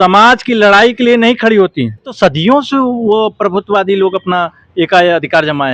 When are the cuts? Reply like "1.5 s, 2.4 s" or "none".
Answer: 2.1 s

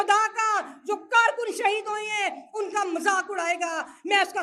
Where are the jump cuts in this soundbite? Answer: none

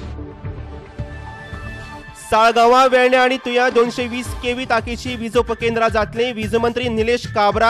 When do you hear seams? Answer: 1.3 s

